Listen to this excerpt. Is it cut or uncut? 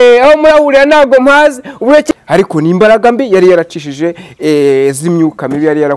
cut